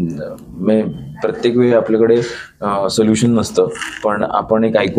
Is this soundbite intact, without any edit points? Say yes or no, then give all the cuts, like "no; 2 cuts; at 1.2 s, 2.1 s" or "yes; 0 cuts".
yes; 0 cuts